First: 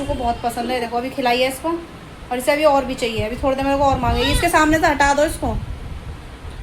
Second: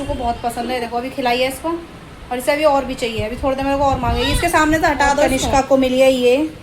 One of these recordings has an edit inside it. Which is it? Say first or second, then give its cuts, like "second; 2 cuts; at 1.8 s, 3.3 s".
second; 1 cut; at 5.3 s